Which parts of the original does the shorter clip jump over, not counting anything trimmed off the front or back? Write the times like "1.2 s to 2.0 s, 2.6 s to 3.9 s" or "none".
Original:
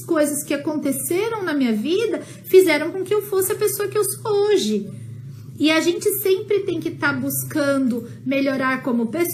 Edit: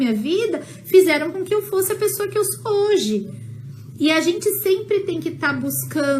none